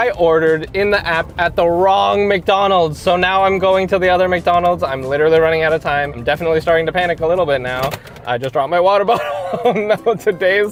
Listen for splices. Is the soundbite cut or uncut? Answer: uncut